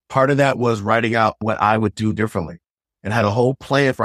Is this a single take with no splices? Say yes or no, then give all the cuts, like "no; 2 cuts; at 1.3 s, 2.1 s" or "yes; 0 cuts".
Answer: no; 1 cut; at 1.4 s